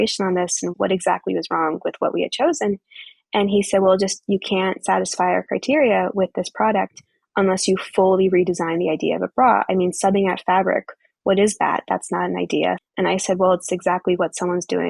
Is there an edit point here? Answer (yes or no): yes